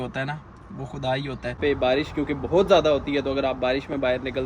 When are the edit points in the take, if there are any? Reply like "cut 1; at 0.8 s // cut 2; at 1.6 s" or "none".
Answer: cut 1; at 1.6 s